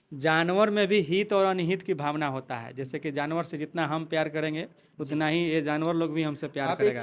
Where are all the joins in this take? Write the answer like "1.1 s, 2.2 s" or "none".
none